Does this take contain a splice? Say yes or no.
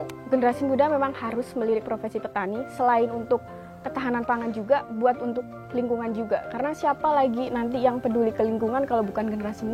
no